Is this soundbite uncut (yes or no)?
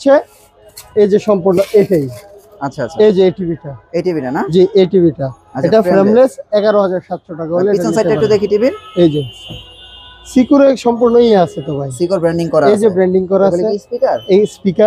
yes